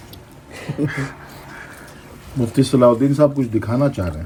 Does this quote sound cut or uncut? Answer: uncut